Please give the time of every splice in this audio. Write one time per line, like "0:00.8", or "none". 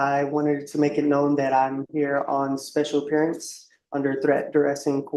none